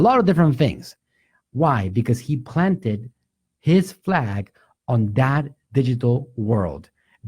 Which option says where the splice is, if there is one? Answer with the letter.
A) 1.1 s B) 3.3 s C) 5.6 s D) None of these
D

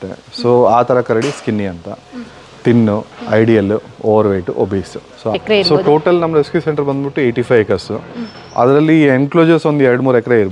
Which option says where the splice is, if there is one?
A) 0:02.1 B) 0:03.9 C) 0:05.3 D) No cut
C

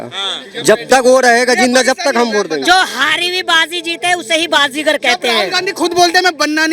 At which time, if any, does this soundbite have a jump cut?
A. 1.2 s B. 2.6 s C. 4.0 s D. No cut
B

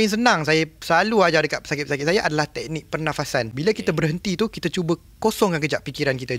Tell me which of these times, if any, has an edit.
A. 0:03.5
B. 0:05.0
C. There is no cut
A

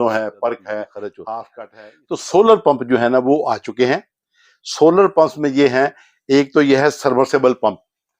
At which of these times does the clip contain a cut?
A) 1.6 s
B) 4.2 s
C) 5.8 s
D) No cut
A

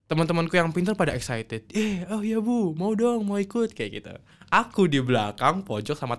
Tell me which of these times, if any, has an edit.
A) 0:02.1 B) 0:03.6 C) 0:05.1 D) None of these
D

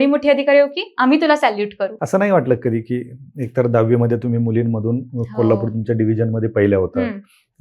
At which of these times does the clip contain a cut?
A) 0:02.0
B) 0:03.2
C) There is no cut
A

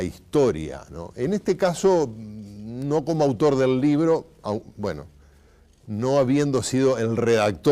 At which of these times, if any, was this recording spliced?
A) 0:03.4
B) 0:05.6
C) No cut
A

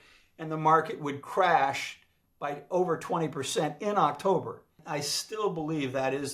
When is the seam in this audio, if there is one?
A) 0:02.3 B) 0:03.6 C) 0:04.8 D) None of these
C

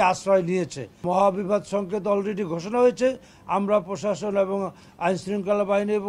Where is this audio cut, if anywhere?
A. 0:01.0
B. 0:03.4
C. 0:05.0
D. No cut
A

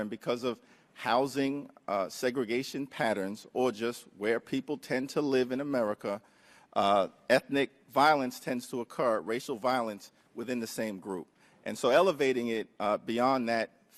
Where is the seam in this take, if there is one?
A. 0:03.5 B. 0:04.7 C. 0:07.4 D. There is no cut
C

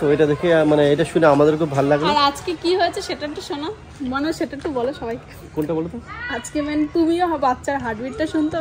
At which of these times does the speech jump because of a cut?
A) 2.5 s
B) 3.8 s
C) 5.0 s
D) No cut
D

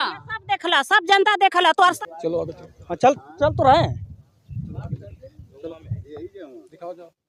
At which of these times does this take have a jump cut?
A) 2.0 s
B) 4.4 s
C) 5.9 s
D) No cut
A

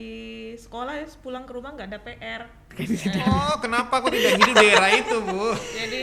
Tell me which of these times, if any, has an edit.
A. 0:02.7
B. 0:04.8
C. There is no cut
A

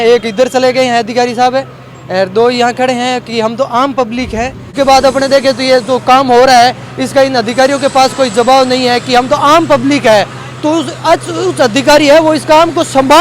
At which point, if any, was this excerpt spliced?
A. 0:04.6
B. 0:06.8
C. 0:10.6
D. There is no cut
A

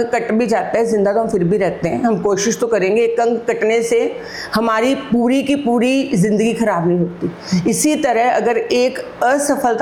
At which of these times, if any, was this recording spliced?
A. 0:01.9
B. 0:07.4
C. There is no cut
C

